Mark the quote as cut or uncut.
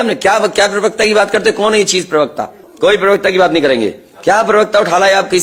uncut